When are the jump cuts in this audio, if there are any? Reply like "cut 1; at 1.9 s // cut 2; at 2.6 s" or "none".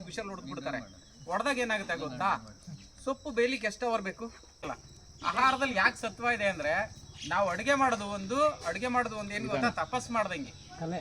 cut 1; at 4.7 s